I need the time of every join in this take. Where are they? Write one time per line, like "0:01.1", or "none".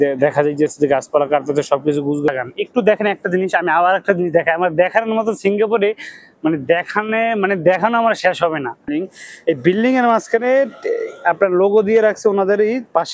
0:02.3
0:08.9